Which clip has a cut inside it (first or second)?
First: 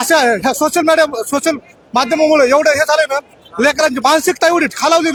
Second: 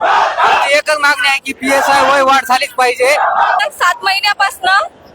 second